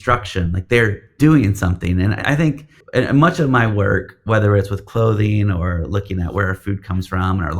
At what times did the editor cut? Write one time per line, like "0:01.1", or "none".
0:01.0
0:02.2